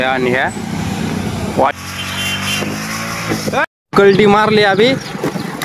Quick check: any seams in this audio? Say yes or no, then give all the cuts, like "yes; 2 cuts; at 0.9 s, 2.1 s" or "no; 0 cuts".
yes; 2 cuts; at 1.7 s, 3.7 s